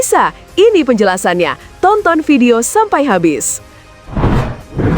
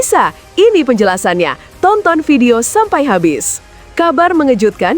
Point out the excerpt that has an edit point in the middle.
first; 1 cut; at 3.8 s

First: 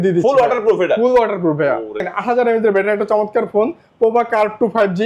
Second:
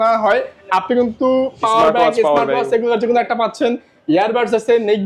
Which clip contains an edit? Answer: first; 1 cut; at 2.1 s

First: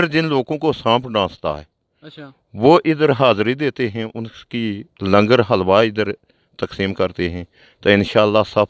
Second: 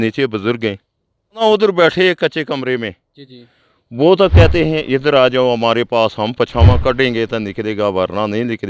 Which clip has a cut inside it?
second; 1 cut; at 1.4 s

